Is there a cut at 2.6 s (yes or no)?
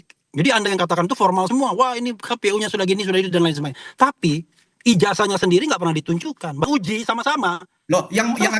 no